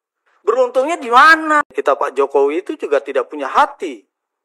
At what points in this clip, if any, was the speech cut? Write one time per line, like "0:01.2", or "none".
0:01.6